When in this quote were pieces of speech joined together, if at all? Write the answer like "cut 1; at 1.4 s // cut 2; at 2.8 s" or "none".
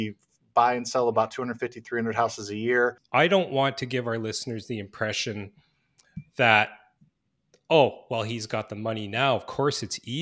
cut 1; at 3.0 s